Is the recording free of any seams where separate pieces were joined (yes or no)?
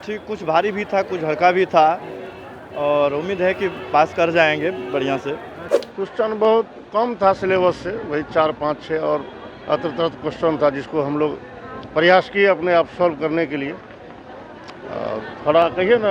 no